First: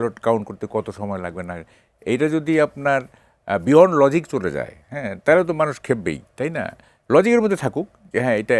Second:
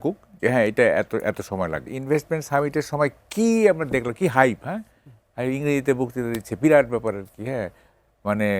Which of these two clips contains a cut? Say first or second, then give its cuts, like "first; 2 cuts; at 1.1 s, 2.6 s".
second; 1 cut; at 1.9 s